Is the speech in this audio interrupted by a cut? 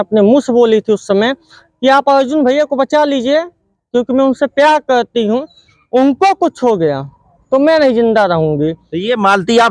no; 0 cuts

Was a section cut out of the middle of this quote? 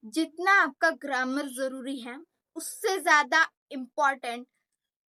no; 0 cuts

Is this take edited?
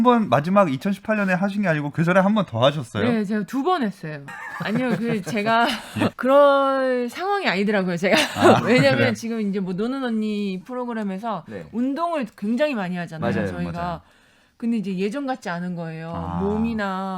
yes; 1 cut; at 4.4 s

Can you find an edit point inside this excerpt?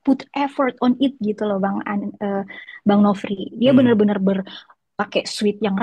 no; 0 cuts

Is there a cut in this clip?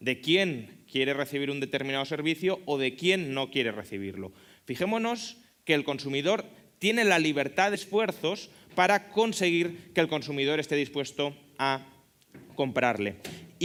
no; 0 cuts

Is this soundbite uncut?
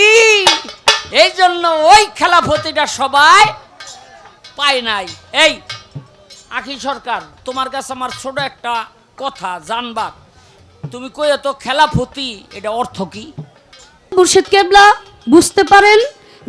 no; 2 cuts; at 1.0 s, 14.1 s

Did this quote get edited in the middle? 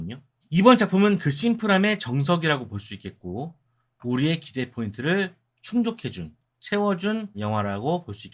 yes; 1 cut; at 7.3 s

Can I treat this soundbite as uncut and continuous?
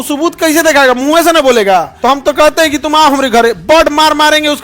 no; 1 cut; at 1.9 s

